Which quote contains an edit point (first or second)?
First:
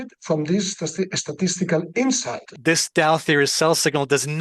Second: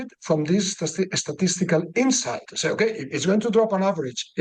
first